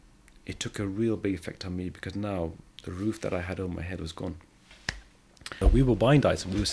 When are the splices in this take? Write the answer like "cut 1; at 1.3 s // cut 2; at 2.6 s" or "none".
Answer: cut 1; at 5.5 s